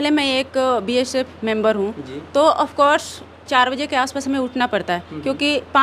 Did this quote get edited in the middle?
no; 0 cuts

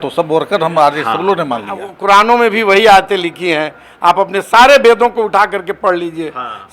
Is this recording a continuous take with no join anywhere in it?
no; 1 cut; at 1.9 s

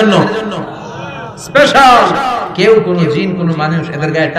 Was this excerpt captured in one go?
no; 1 cut; at 2.4 s

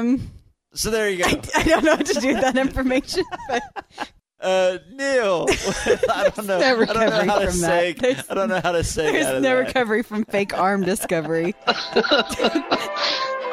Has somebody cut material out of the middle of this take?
no; 0 cuts

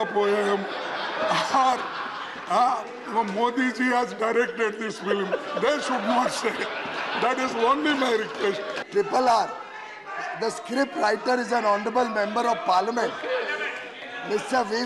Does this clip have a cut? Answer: yes; 1 cut; at 8.7 s

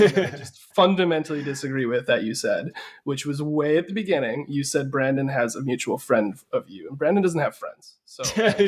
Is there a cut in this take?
no; 0 cuts

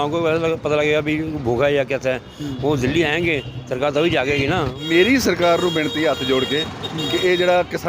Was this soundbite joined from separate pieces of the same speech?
yes; 1 cut; at 4.8 s

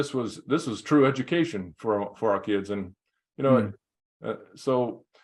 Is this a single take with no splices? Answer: yes; 0 cuts

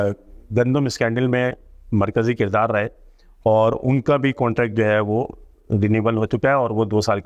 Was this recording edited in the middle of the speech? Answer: no; 0 cuts

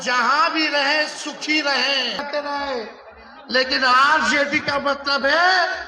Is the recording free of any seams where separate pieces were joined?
no; 1 cut; at 2.2 s

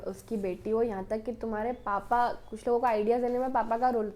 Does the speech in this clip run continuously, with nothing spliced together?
yes; 0 cuts

